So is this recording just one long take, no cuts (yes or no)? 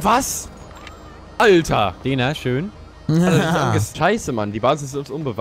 no